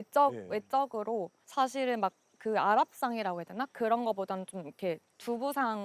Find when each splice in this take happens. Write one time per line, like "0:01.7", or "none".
0:01.4